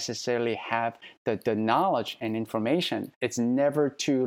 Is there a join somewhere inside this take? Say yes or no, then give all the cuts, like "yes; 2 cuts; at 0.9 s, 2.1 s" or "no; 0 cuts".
yes; 1 cut; at 3.2 s